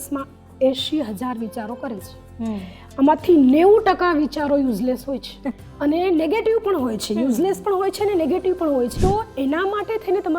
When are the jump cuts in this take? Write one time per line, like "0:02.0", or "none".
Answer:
0:05.6
0:08.9